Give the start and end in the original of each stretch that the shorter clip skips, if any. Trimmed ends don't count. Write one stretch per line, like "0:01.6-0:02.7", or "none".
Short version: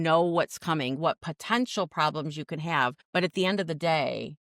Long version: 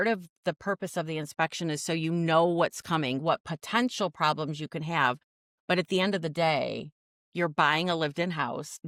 0:05.2-0:05.6